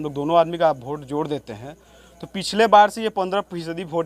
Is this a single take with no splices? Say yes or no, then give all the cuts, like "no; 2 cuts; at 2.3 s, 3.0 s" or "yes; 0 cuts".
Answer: yes; 0 cuts